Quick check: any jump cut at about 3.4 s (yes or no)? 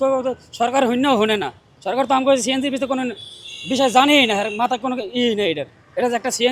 no